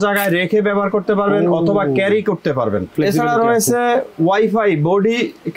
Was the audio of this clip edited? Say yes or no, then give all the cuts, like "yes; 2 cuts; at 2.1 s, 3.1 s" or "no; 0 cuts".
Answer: yes; 1 cut; at 2.9 s